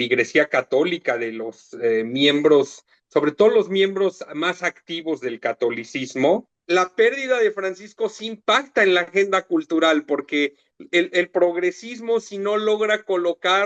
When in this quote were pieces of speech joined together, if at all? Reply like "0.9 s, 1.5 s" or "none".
6.5 s